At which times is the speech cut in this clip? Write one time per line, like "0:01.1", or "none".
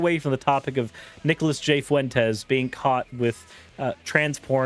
none